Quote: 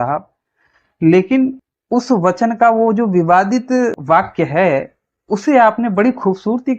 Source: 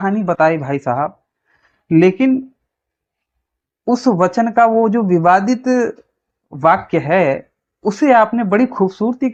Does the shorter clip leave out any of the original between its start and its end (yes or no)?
yes